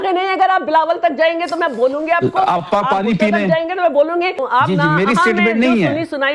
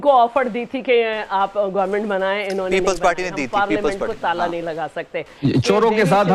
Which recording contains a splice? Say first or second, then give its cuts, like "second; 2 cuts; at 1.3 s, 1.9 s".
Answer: first; 1 cut; at 4.3 s